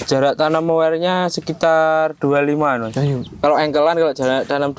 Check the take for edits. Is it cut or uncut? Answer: cut